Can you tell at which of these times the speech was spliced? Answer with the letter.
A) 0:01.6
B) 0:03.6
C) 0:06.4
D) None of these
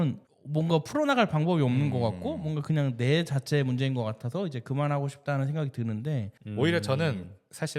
C